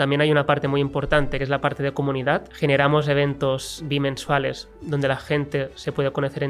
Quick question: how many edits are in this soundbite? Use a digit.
3